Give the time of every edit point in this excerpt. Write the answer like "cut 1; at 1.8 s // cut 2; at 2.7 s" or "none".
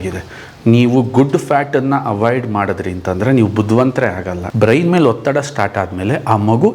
cut 1; at 4.4 s